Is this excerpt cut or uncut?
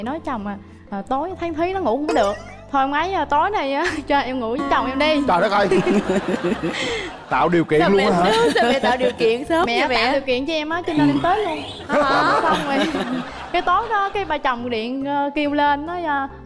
uncut